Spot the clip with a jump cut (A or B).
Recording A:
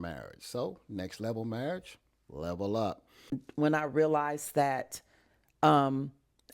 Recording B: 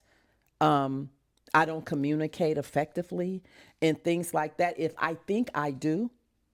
A